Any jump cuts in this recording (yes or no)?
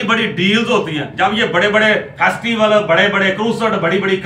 yes